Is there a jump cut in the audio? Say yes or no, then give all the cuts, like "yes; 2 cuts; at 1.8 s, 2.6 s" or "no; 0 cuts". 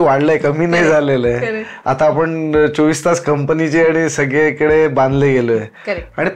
no; 0 cuts